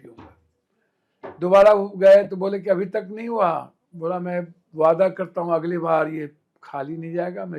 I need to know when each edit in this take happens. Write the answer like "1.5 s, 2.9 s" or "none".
none